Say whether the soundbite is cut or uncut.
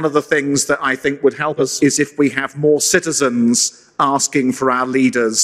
cut